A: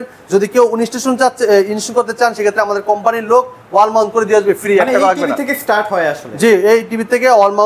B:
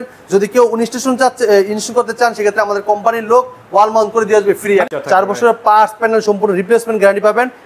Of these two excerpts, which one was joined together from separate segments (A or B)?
B